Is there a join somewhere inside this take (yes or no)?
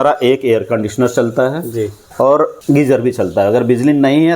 yes